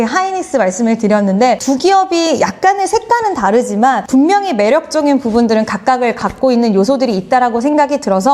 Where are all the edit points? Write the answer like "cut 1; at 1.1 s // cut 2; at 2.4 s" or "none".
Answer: cut 1; at 1.6 s // cut 2; at 4.0 s